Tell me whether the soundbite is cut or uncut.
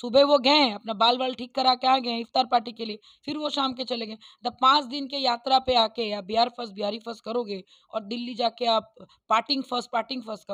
uncut